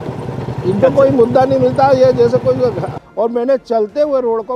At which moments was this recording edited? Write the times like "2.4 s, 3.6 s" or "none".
2.9 s